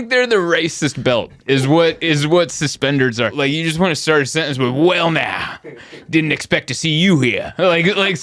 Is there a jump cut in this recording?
yes; 1 cut; at 3.4 s

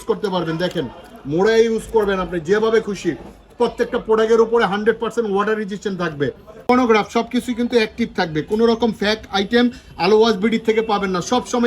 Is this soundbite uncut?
no; 1 cut; at 6.6 s

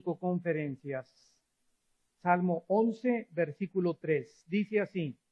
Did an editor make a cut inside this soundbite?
no; 0 cuts

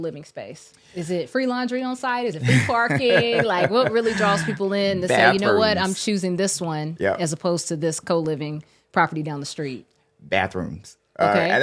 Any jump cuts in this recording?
no; 0 cuts

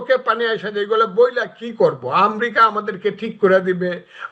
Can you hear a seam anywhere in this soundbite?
no; 0 cuts

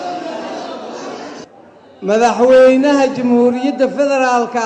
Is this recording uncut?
no; 1 cut; at 1.4 s

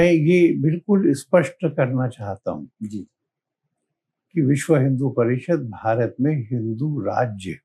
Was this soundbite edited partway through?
no; 0 cuts

